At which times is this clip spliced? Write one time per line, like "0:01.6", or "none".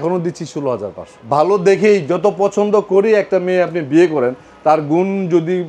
0:01.1